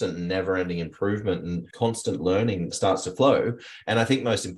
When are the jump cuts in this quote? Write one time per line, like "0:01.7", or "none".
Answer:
0:01.6